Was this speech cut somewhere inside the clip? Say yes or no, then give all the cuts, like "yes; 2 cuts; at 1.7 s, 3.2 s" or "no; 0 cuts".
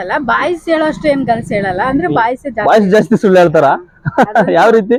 no; 0 cuts